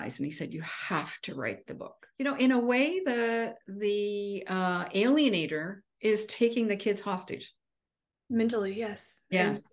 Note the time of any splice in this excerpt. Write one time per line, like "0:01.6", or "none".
0:02.1